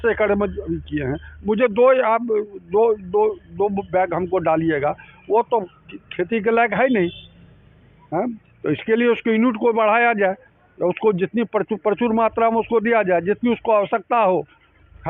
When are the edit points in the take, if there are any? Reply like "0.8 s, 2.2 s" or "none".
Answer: none